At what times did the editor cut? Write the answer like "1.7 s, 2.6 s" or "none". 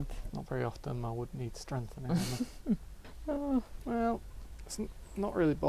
3.5 s